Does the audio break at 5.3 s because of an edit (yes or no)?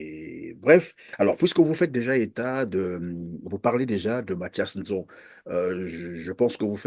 no